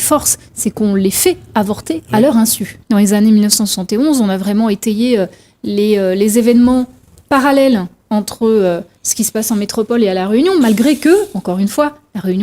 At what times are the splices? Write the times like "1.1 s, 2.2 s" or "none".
2.7 s